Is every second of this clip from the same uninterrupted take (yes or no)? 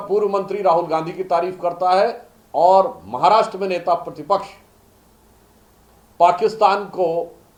yes